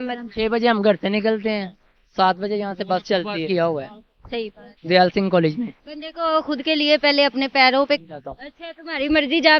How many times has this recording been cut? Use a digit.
2